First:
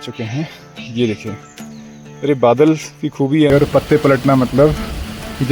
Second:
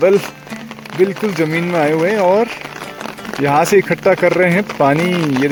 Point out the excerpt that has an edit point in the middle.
first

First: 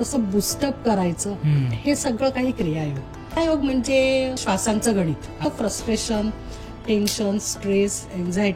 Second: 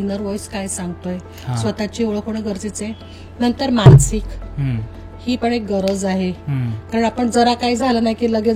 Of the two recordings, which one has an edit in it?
first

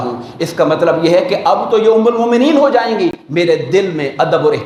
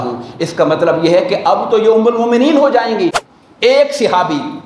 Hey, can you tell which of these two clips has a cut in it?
second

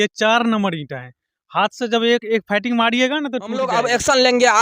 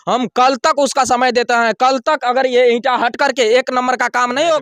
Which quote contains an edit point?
first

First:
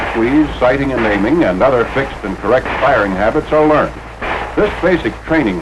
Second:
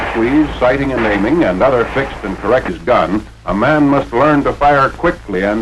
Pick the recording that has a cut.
first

